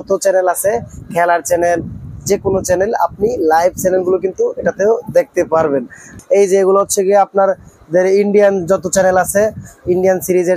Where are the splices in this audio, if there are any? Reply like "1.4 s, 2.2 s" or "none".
6.0 s